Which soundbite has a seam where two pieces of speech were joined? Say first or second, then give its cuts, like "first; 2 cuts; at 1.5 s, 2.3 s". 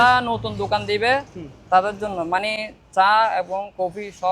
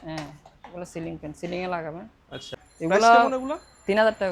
second; 1 cut; at 2.6 s